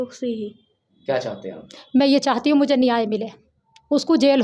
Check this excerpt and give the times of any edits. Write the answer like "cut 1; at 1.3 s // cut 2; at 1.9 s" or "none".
cut 1; at 1.0 s